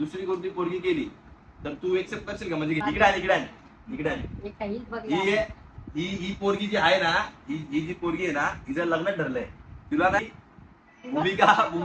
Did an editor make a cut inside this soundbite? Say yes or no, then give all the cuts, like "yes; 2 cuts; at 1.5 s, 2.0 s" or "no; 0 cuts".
yes; 2 cuts; at 2.8 s, 10.2 s